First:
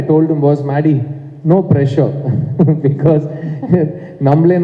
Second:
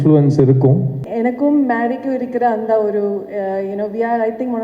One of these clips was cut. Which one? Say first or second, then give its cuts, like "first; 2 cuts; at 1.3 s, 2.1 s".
second; 1 cut; at 1.0 s